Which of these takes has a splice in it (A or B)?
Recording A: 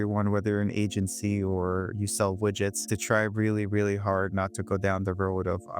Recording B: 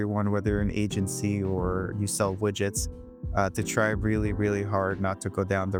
A